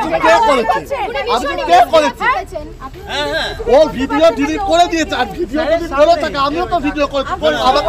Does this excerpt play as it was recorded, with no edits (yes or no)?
yes